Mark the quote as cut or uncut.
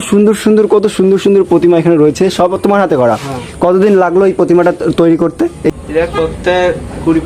cut